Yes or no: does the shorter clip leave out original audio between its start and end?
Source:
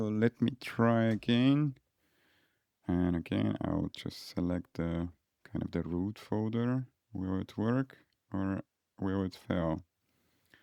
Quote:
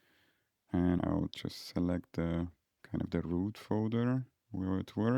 yes